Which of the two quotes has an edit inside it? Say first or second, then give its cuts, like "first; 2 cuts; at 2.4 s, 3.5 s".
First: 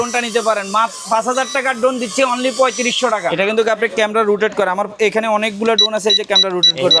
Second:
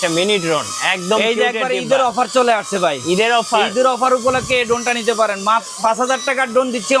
first; 1 cut; at 3.3 s